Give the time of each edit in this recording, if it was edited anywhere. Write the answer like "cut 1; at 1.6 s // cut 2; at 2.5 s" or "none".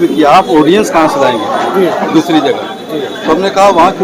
none